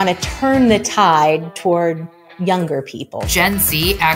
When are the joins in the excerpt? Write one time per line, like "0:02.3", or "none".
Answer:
0:03.2